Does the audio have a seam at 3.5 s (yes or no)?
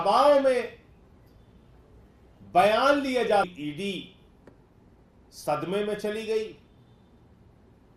yes